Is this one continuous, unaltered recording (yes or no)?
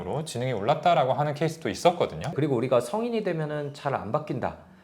no